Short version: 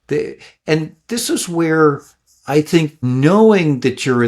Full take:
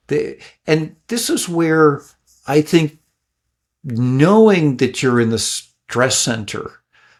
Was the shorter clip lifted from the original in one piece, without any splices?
no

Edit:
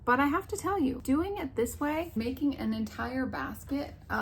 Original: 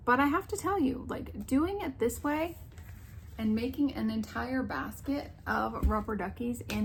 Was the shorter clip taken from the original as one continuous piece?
no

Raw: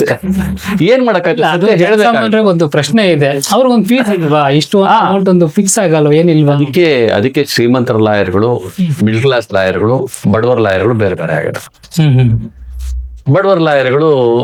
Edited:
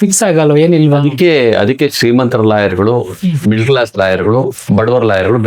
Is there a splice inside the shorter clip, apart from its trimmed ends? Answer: no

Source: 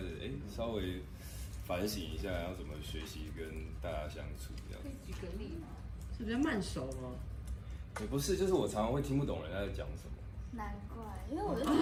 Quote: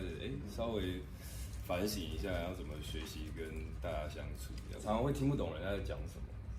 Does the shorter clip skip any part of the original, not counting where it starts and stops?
yes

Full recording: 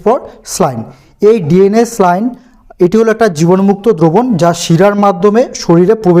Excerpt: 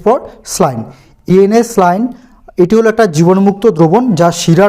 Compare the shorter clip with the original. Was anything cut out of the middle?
yes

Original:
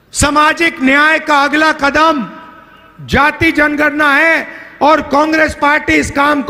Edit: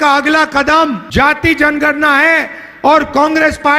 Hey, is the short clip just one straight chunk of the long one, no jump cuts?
no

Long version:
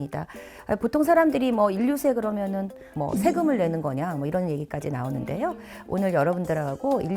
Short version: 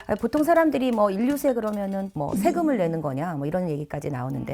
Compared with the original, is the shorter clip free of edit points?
no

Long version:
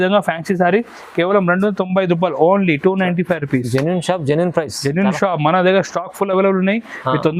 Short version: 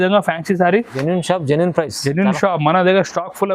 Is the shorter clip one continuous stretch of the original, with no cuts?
no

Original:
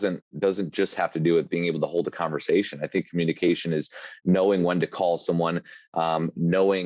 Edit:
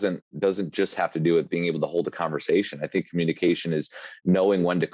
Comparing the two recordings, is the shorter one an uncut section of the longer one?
yes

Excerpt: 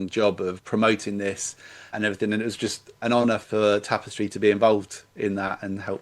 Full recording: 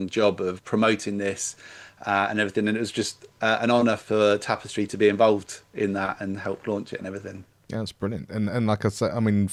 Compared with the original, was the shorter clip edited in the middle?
yes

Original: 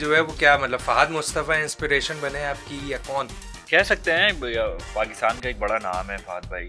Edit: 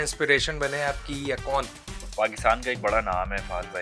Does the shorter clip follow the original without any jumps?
no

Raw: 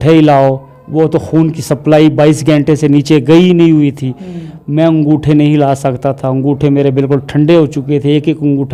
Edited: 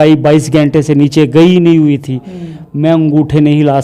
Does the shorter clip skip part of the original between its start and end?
no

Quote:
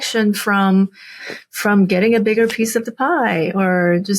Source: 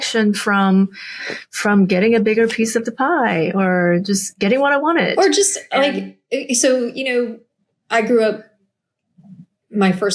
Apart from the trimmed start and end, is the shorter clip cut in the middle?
no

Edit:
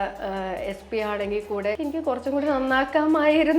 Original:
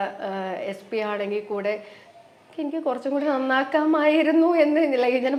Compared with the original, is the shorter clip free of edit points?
no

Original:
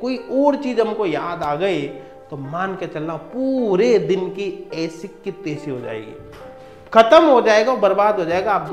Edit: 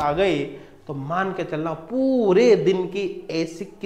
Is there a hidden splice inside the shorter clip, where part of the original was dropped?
no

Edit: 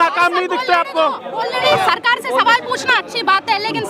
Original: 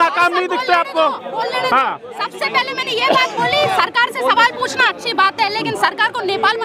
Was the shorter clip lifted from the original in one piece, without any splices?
no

